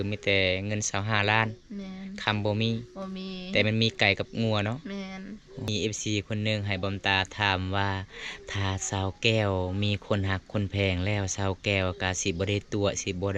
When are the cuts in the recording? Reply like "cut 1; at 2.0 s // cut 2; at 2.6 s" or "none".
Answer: cut 1; at 5.7 s